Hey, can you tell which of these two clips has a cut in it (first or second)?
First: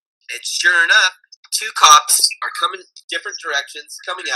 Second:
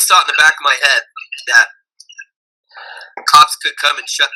first